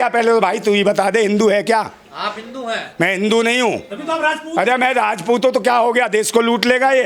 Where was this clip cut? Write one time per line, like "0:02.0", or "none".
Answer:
none